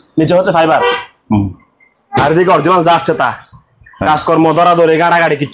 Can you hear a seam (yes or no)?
no